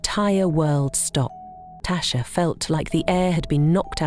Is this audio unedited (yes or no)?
no